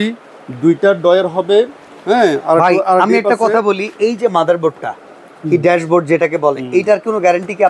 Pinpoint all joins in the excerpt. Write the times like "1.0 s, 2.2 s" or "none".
none